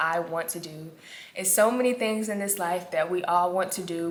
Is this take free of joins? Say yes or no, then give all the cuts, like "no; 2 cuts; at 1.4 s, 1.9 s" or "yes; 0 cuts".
yes; 0 cuts